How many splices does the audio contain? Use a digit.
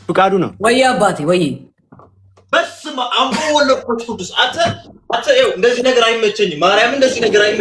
0